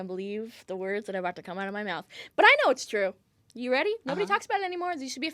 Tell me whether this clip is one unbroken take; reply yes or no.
yes